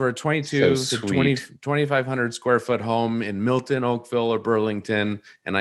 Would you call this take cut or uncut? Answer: uncut